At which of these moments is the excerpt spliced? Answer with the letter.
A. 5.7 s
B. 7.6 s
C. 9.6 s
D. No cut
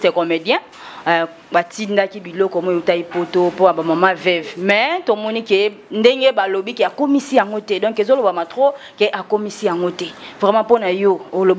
D